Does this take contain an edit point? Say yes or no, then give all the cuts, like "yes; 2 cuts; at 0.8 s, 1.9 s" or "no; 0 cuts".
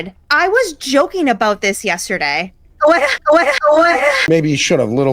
yes; 1 cut; at 4.2 s